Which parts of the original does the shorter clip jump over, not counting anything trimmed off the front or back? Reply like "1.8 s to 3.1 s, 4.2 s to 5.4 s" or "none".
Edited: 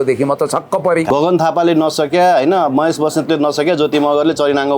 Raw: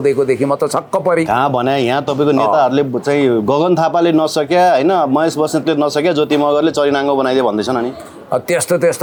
1.3 s to 3.4 s